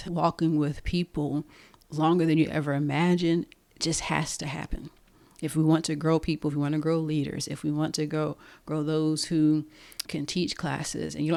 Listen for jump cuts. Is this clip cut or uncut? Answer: uncut